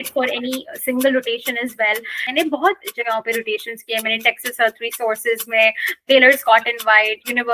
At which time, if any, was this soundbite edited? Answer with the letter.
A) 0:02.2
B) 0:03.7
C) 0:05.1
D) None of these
A